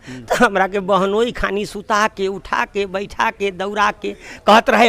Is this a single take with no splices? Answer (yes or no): yes